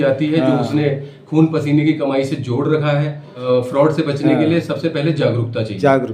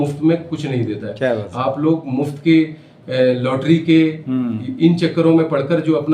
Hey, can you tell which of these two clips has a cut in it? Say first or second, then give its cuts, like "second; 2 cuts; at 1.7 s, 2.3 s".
first; 1 cut; at 3.3 s